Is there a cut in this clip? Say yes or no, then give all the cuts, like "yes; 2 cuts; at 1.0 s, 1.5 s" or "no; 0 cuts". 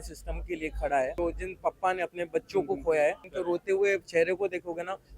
yes; 2 cuts; at 1.1 s, 3.3 s